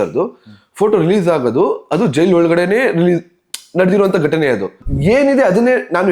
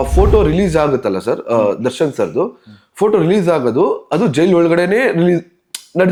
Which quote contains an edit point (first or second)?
first